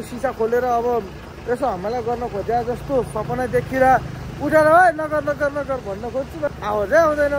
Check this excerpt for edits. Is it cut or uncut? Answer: cut